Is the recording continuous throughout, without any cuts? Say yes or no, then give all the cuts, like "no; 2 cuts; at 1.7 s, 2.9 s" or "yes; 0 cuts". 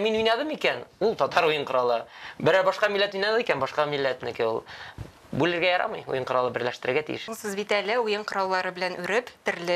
no; 1 cut; at 7.3 s